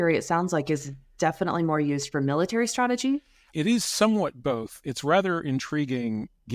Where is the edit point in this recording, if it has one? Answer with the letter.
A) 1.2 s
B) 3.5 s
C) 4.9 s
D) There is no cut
B